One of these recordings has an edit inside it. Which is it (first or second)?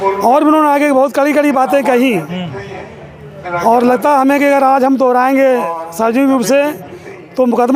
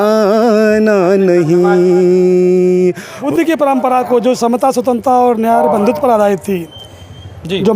second